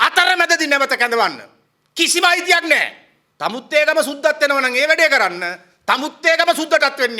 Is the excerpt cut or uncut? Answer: cut